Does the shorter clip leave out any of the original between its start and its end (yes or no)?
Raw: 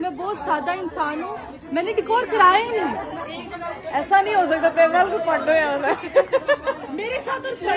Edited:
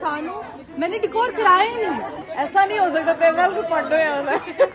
yes